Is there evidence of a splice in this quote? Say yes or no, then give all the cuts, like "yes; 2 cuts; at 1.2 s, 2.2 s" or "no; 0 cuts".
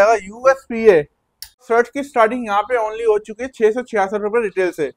yes; 1 cut; at 1.6 s